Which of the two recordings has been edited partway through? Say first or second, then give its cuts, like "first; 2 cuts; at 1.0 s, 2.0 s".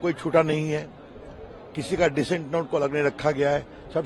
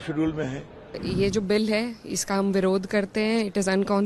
second; 1 cut; at 1.0 s